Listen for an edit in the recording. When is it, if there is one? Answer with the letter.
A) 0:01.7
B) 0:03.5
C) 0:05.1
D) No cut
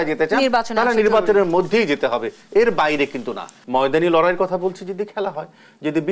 B